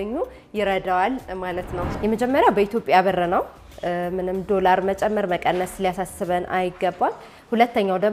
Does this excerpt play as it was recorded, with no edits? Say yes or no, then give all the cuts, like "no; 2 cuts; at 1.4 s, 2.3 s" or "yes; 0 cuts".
no; 1 cut; at 1.8 s